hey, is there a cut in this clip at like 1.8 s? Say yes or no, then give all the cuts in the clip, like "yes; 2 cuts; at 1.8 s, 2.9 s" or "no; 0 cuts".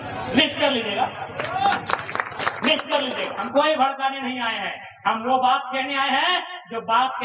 no; 1 cut; at 3.5 s